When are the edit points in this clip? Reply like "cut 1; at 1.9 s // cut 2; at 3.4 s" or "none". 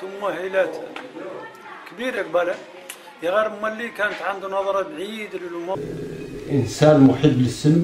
cut 1; at 5.7 s